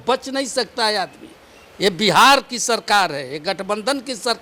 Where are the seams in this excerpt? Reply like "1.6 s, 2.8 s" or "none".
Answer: none